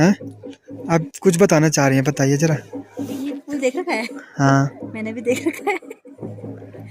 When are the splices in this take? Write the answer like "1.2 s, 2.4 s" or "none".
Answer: none